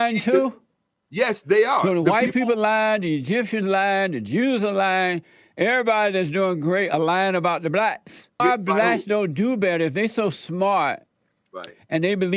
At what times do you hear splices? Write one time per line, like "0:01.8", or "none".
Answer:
0:08.4

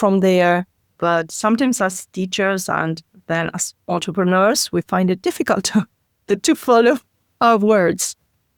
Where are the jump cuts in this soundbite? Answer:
none

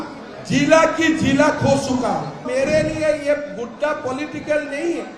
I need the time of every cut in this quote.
0:02.5

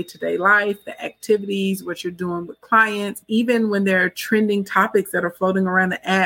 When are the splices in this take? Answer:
0:03.2

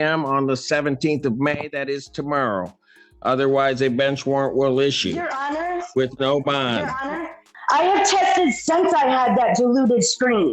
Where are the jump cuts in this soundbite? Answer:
0:07.5

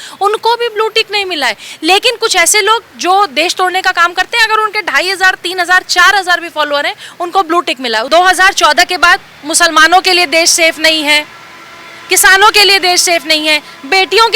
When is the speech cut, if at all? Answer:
0:08.1

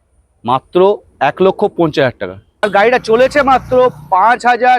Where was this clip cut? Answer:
0:02.6

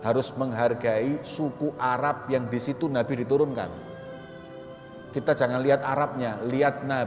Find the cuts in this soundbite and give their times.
none

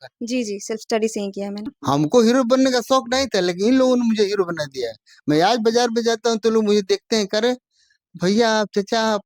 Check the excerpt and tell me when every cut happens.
0:01.6

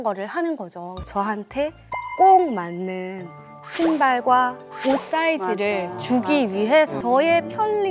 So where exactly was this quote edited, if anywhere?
0:01.0
0:07.0

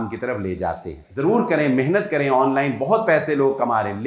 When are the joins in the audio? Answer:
0:01.0

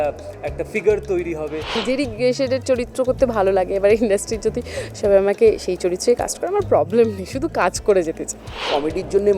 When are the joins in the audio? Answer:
0:01.8
0:08.6

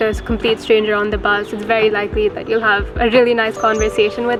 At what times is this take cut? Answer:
none

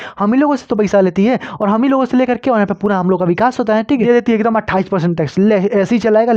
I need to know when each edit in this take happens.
0:04.0

